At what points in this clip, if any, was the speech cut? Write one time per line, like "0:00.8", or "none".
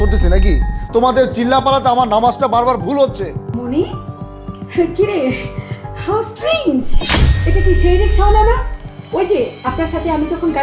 0:03.5